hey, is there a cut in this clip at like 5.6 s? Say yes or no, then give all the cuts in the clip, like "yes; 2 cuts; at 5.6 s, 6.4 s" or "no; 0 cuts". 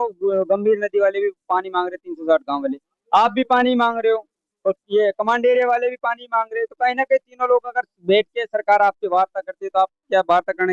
no; 0 cuts